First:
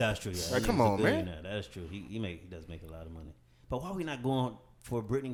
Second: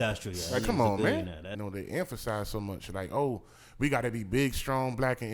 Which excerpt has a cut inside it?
second; 1 cut; at 1.5 s

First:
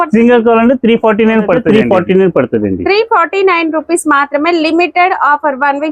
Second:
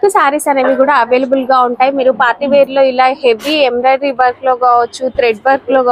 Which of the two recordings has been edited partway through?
first; 1 cut; at 1.6 s

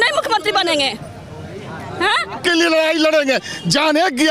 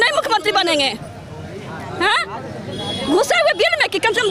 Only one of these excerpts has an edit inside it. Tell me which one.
first; 1 cut; at 2.4 s

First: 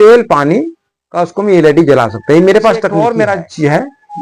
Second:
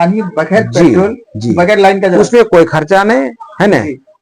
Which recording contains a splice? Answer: first; 1 cut; at 2.9 s

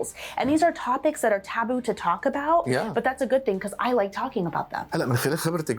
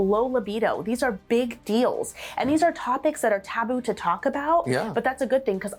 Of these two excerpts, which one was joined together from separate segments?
first; 1 cut; at 4.9 s

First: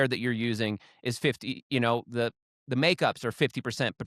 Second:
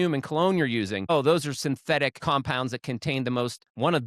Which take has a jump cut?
second; 2 cuts; at 1.1 s, 2.2 s

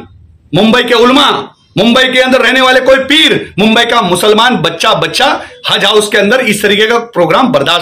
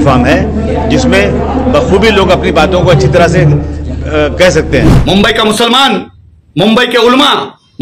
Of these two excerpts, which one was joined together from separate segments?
second; 1 cut; at 4.9 s

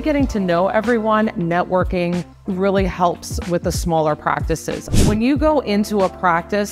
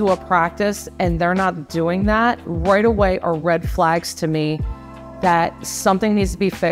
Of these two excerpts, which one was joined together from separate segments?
first; 2 cuts; at 2.4 s, 4.8 s

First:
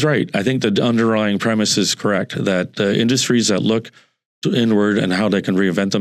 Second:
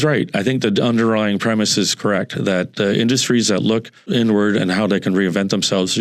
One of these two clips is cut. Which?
second; 1 cut; at 4.0 s

